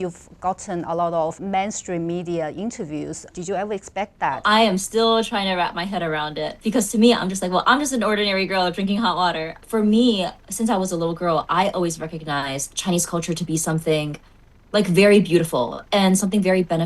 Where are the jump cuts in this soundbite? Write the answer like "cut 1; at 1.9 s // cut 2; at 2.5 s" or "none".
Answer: cut 1; at 3.3 s // cut 2; at 4.4 s // cut 3; at 9.6 s